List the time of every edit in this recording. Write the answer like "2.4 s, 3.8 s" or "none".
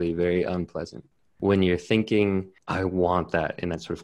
1.3 s, 2.6 s